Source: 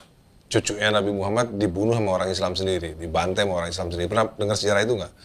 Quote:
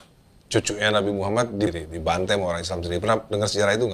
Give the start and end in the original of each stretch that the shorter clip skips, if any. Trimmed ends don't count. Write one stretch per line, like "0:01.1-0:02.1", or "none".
0:01.7-0:02.8